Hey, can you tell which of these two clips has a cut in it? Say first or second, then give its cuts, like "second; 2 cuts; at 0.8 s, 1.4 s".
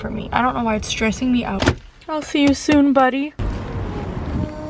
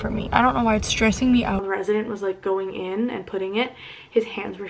second; 1 cut; at 1.6 s